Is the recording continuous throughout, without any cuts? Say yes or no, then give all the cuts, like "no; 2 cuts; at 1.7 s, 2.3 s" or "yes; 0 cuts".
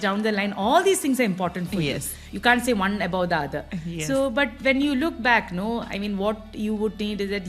no; 1 cut; at 2.2 s